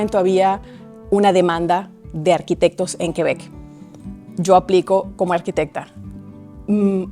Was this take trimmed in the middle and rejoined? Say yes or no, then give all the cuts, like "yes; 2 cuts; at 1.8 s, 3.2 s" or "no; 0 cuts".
no; 0 cuts